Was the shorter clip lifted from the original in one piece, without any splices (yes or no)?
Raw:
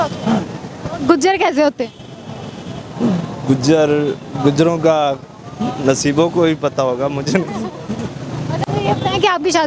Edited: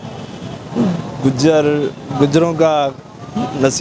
yes